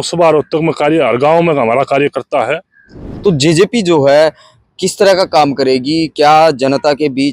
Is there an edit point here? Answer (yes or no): yes